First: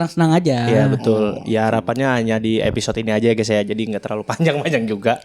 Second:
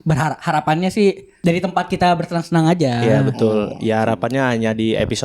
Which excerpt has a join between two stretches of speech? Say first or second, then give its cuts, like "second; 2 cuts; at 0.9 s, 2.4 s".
second; 1 cut; at 1.3 s